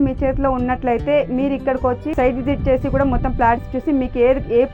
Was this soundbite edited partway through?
yes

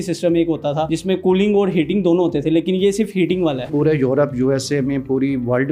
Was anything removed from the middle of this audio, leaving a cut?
yes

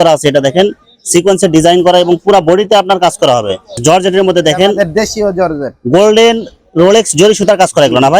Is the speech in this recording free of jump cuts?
no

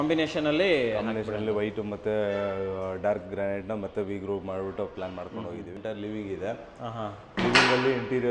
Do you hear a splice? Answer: yes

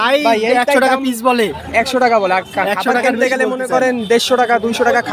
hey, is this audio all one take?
yes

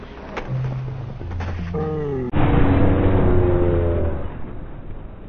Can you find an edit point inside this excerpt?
yes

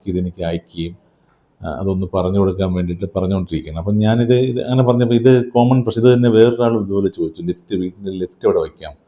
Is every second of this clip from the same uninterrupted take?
yes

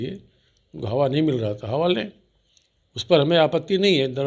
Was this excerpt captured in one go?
yes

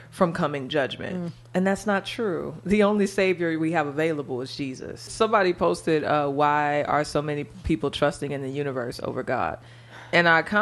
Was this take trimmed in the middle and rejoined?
yes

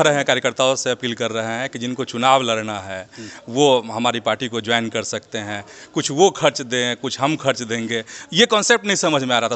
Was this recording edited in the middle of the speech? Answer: no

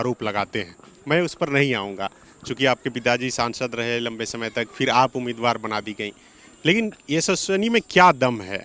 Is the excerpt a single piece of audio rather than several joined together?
yes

